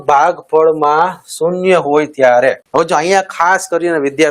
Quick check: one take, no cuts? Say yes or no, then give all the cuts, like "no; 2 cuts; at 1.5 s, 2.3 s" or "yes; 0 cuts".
no; 1 cut; at 2.6 s